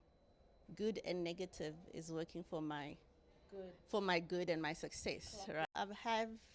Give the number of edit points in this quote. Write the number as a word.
one